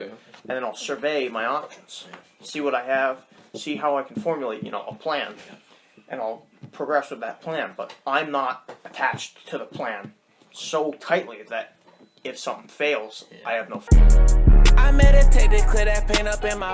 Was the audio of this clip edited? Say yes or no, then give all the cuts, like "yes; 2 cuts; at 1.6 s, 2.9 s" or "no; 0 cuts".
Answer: yes; 1 cut; at 13.8 s